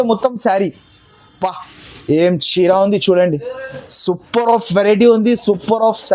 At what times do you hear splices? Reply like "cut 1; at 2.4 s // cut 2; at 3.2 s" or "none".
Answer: none